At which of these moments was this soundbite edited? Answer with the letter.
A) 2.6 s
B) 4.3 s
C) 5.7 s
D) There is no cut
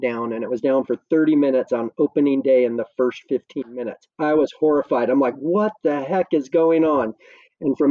D